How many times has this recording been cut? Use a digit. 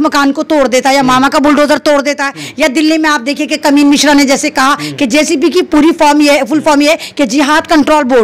0